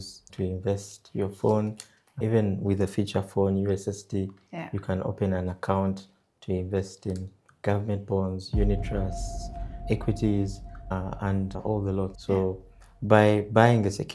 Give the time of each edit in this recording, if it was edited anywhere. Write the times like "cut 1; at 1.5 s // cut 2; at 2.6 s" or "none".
cut 1; at 12.1 s

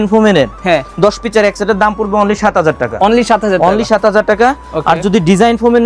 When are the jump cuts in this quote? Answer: none

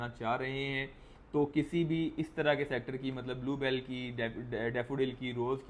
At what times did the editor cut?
none

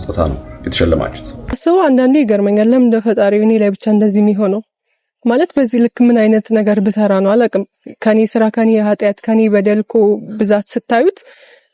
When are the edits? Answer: cut 1; at 1.6 s

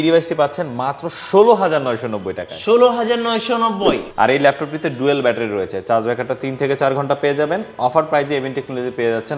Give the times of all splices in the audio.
cut 1; at 4.1 s

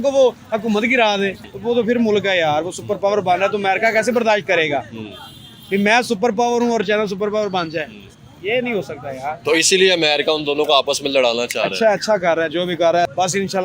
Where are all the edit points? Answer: none

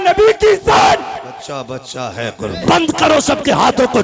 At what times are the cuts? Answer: cut 1; at 2.6 s

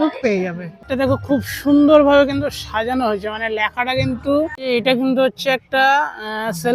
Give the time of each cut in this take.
cut 1; at 0.8 s // cut 2; at 4.6 s

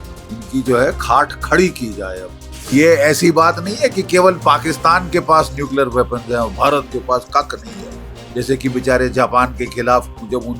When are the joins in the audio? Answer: cut 1; at 2.7 s

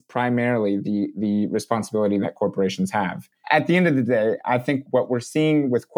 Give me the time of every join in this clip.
cut 1; at 3.4 s // cut 2; at 4.8 s

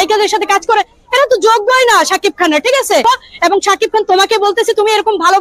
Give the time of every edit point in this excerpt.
cut 1; at 3.0 s

